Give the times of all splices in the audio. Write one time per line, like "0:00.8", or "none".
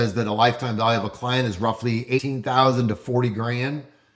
0:02.2